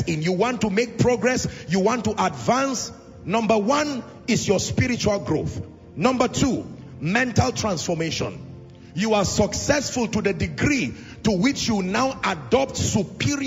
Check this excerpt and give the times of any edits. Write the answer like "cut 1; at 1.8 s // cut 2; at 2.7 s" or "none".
none